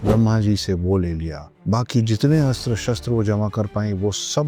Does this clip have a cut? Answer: no; 0 cuts

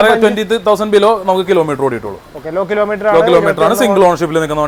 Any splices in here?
no; 0 cuts

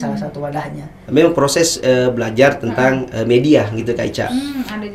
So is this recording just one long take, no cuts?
no; 1 cut; at 0.9 s

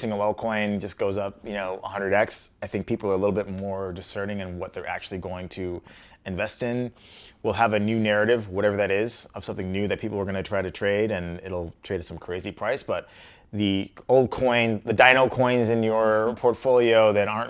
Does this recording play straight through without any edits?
yes; 0 cuts

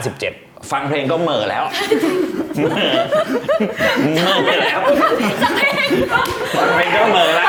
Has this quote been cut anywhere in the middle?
no; 0 cuts

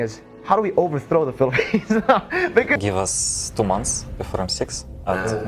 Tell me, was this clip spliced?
yes; 1 cut; at 2.8 s

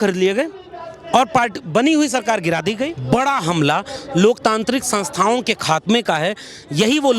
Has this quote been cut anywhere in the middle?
yes; 1 cut; at 2.9 s

